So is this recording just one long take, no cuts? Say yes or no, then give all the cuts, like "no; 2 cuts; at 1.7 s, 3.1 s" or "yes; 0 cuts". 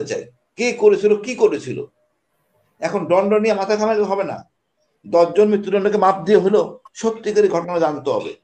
yes; 0 cuts